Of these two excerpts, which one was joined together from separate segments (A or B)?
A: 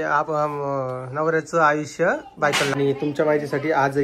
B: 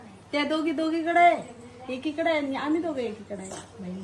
A